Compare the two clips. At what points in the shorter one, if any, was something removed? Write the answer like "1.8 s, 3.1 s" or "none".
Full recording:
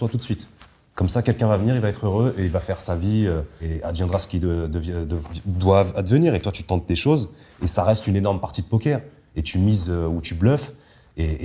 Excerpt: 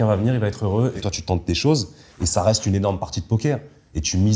1.0 s